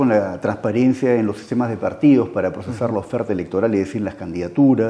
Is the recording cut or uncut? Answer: uncut